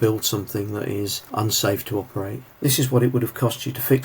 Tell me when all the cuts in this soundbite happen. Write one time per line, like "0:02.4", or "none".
0:01.2
0:02.4